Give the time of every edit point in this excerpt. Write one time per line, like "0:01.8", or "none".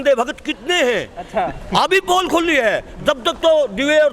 none